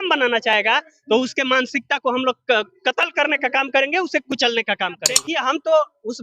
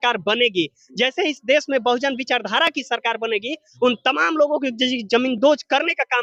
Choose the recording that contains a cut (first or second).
first